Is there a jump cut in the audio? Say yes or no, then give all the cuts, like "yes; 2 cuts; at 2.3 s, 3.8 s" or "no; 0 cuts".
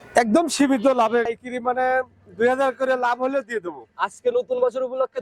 yes; 1 cut; at 1.3 s